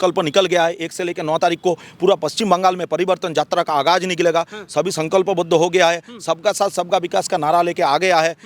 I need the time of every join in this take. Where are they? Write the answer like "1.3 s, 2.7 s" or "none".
none

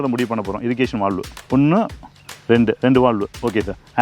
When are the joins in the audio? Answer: 1.3 s

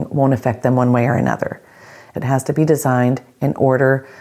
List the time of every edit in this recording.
2.0 s

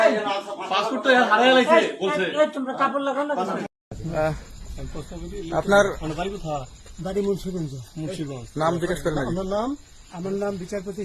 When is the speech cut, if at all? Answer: 3.8 s

